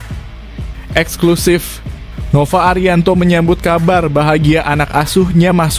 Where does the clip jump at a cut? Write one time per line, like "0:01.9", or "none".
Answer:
0:00.9